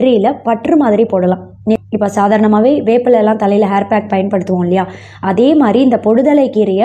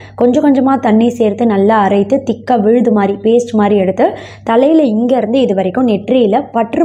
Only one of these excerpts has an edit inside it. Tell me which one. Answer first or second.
first